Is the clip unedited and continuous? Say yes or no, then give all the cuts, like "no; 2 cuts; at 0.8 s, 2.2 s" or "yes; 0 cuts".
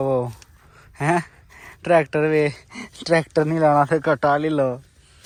yes; 0 cuts